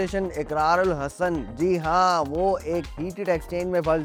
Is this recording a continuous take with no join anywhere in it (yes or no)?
yes